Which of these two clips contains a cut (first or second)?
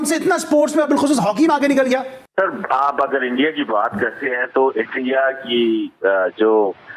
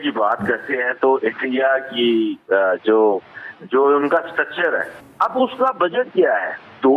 second